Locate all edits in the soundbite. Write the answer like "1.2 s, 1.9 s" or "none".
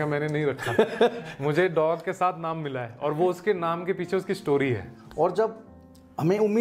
5.0 s